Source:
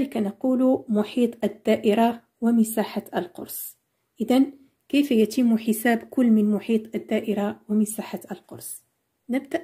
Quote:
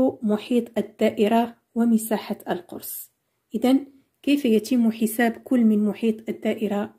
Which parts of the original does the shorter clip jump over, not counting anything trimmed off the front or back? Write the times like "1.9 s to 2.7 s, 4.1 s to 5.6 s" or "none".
none

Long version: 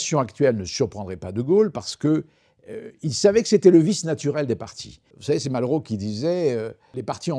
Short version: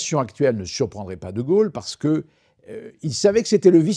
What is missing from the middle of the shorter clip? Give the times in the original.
none

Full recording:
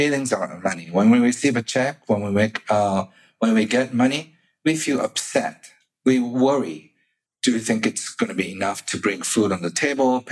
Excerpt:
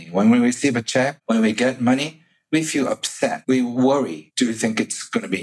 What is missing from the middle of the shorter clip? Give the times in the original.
2.0 s to 3.3 s, 5.5 s to 6.0 s, 6.8 s to 7.3 s

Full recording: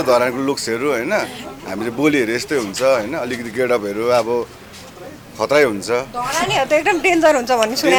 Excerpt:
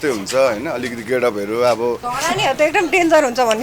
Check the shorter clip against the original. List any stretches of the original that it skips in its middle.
4.6 s to 6.2 s

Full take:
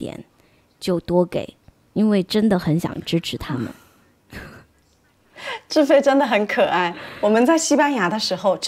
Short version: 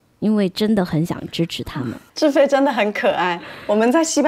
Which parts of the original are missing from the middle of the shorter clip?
3.8 s to 5.6 s

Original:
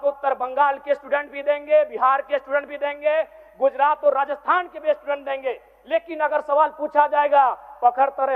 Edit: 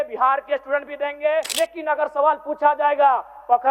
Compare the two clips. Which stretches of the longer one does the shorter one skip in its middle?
3.3 s to 5.8 s

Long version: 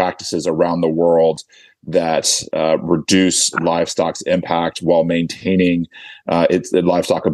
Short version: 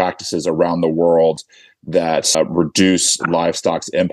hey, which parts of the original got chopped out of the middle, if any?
2.3 s to 2.7 s

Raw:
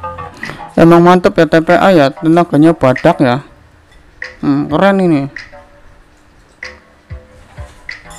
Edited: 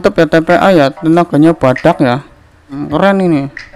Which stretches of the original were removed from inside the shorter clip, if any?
4.0 s to 4.6 s

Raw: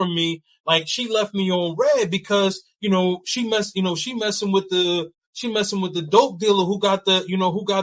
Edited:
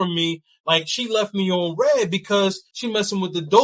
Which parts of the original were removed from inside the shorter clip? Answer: 2.7 s to 5.3 s

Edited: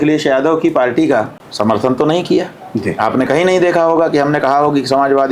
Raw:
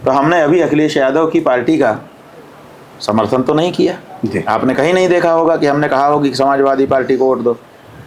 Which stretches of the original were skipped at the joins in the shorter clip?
2.1 s to 2.9 s

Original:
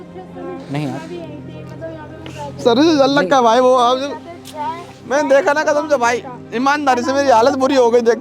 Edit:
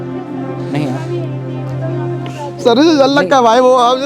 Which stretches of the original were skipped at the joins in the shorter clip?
none

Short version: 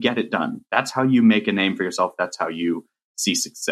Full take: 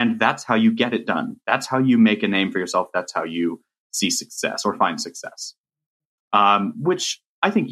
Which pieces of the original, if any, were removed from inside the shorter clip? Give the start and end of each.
none

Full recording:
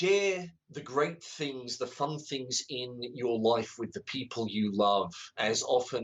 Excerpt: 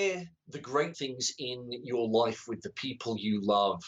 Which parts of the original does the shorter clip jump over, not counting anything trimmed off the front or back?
1.2 s to 2.3 s

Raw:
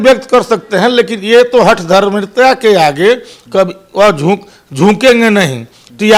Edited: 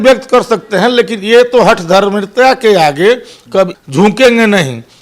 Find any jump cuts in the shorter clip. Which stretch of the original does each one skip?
3.8 s to 4.6 s

